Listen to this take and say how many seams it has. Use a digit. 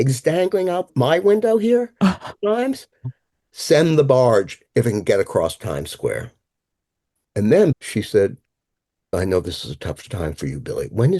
3